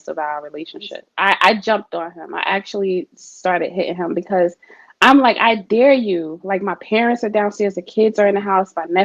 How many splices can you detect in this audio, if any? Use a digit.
1